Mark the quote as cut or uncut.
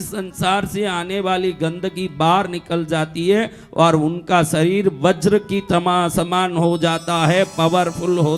uncut